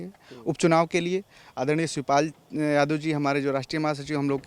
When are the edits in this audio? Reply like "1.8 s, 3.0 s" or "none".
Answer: none